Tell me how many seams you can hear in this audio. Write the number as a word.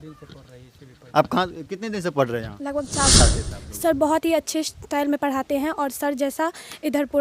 one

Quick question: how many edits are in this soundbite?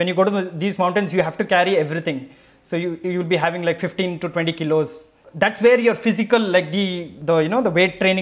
two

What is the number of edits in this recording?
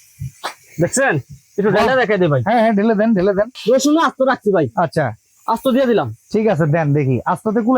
one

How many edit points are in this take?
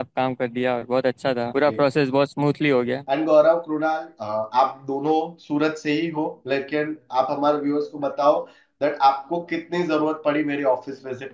two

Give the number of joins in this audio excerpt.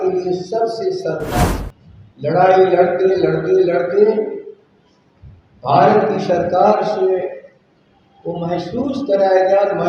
one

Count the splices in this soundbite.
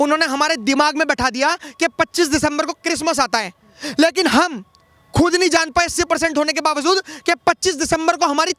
zero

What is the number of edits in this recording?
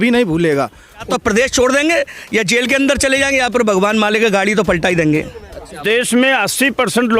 two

